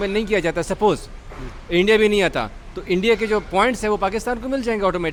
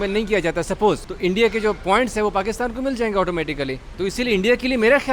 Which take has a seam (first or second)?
second